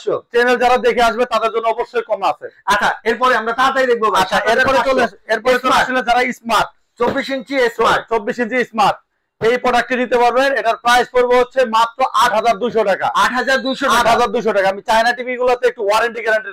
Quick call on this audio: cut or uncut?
uncut